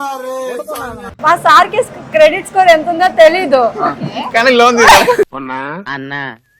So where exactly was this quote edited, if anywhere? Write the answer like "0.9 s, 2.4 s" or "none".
1.0 s